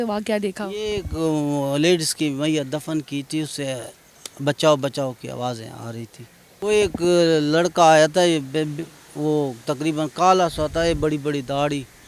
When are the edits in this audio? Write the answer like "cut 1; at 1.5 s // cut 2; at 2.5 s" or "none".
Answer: cut 1; at 6.5 s